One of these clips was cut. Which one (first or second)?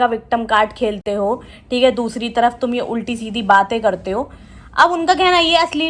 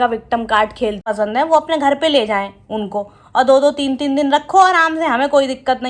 second